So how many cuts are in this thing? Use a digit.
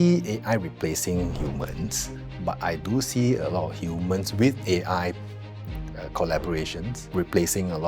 0